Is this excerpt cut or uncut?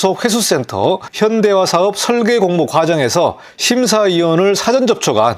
cut